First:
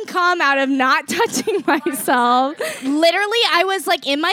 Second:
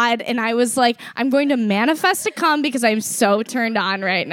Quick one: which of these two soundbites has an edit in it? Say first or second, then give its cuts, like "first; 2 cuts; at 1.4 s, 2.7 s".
first; 1 cut; at 2.8 s